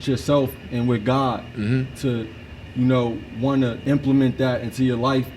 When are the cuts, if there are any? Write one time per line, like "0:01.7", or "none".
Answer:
0:03.8